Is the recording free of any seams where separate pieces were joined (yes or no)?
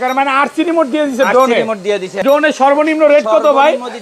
no